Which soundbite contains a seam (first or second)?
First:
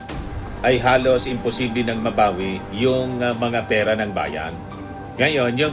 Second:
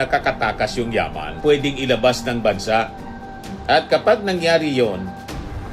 second